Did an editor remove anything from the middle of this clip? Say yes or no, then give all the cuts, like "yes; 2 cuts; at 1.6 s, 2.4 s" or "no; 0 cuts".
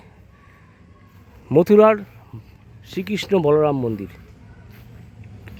no; 0 cuts